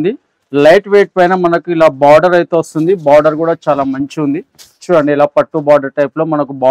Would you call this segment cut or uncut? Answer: uncut